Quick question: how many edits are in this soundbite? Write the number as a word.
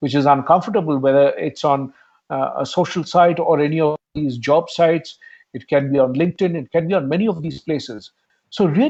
zero